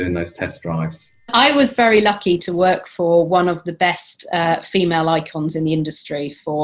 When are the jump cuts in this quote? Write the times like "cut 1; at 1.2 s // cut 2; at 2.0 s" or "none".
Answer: cut 1; at 1.3 s